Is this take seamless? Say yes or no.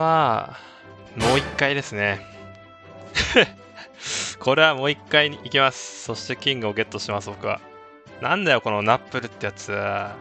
yes